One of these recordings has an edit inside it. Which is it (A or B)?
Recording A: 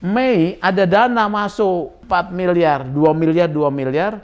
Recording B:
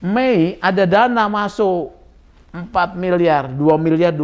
A